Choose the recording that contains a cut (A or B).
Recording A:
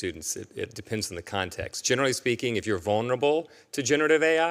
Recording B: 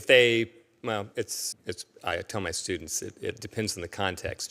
B